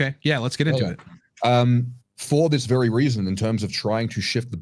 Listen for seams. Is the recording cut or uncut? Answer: uncut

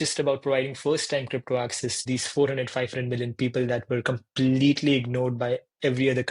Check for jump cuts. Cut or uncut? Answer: cut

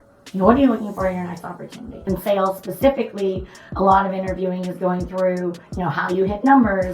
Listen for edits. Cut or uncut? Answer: cut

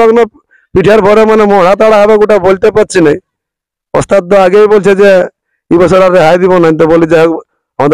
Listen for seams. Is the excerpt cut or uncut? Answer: uncut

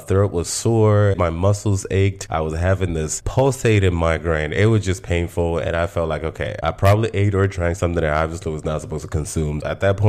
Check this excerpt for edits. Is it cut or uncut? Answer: cut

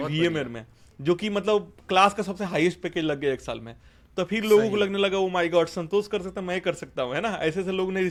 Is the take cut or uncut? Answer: uncut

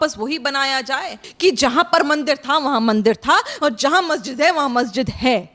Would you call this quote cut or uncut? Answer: cut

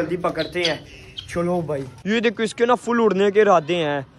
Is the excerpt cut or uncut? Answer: cut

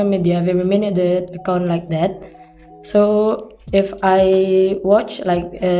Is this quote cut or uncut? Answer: uncut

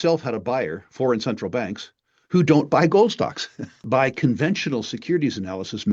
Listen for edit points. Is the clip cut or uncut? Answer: cut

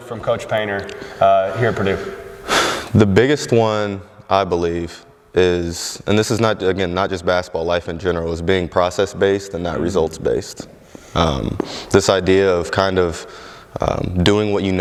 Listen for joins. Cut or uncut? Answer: uncut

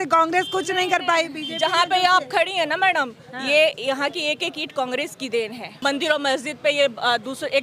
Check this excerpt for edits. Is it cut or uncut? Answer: cut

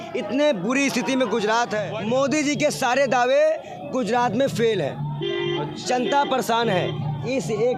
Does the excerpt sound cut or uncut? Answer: cut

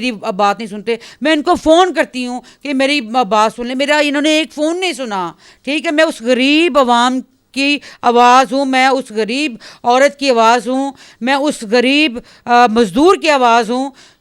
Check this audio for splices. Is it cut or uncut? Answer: uncut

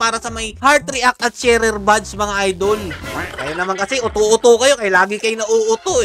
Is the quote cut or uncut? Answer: cut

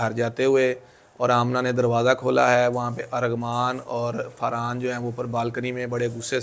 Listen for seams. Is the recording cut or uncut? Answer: uncut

